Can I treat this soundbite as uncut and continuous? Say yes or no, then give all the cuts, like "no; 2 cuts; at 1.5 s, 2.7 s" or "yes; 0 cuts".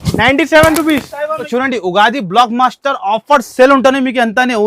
no; 1 cut; at 1.4 s